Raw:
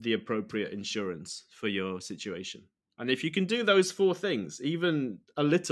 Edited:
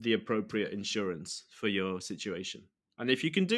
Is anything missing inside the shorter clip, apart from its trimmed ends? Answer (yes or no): no